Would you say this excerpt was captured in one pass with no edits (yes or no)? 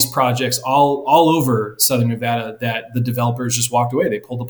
yes